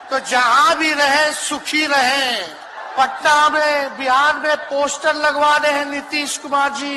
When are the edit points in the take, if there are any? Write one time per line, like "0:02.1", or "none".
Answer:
0:02.7